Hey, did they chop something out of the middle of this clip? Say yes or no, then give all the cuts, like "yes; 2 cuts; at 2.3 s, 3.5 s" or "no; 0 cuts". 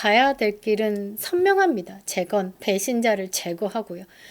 yes; 1 cut; at 2.5 s